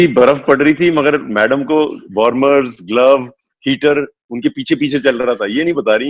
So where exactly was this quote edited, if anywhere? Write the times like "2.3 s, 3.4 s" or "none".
none